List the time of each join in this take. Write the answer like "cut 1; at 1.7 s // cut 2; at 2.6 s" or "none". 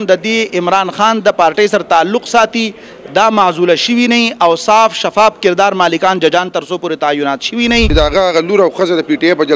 cut 1; at 7.9 s